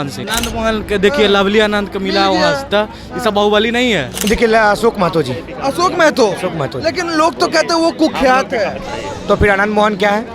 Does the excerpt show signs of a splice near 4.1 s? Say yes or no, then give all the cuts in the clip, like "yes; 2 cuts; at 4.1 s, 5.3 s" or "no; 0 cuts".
yes; 1 cut; at 4.1 s